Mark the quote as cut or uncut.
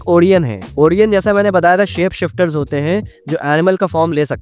uncut